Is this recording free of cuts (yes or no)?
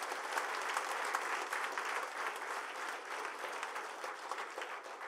yes